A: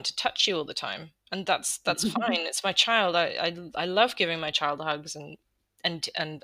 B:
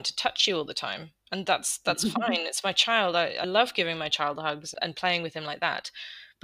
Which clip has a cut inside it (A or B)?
B